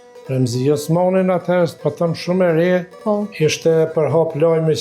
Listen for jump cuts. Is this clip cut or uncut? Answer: cut